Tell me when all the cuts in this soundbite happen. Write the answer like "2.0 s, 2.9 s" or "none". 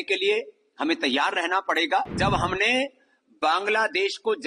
2.2 s

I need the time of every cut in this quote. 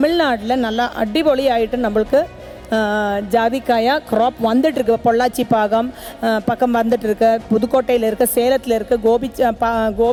none

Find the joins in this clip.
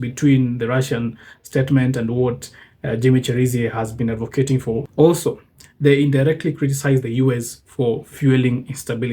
4.9 s

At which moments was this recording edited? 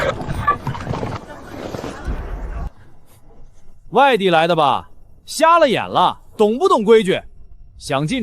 1.2 s

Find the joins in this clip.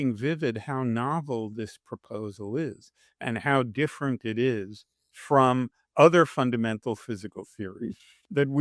none

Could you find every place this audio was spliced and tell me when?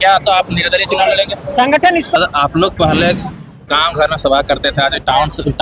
2.2 s

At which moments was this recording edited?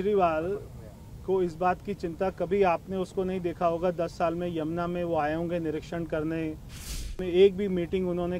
7.1 s

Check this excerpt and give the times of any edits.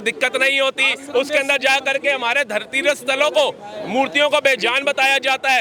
none

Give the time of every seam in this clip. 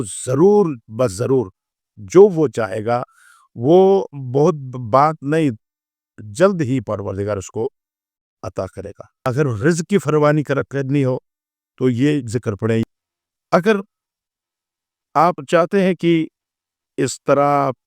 9.2 s, 12.8 s

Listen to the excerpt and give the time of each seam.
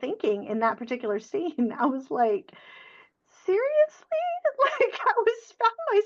none

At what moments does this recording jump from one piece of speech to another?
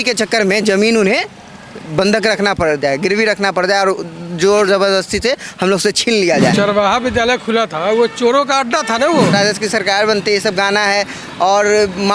6.5 s, 9.3 s

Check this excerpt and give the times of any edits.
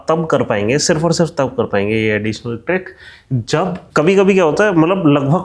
3.8 s

